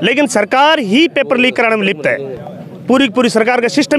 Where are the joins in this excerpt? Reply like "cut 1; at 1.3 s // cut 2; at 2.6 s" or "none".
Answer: none